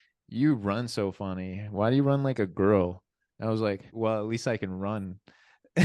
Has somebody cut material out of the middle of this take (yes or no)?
yes